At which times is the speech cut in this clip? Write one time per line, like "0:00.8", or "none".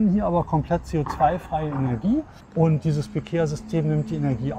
0:02.4